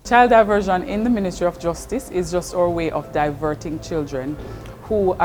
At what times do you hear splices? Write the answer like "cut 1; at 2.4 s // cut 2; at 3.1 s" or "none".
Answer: none